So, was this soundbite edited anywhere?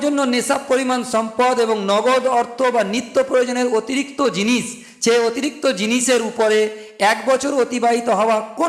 no; 0 cuts

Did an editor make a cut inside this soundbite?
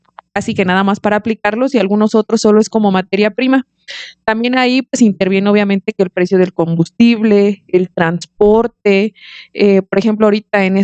no; 0 cuts

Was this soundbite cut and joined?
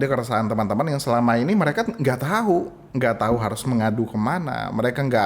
yes; 1 cut; at 2.8 s

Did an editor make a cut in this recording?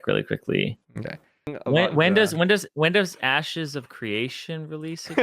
yes; 1 cut; at 1.5 s

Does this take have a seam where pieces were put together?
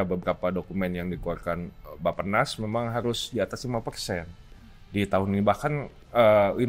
no; 0 cuts

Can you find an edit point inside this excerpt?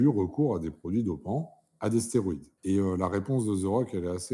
yes; 1 cut; at 2.5 s

